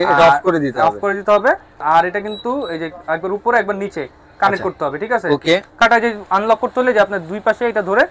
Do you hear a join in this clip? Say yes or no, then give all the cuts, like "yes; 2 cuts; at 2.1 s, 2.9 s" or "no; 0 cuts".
yes; 2 cuts; at 1.8 s, 5.8 s